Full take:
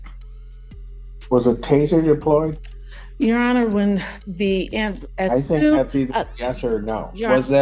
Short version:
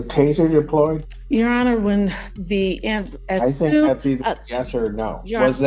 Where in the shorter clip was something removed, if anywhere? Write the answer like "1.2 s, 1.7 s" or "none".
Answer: 1.1 s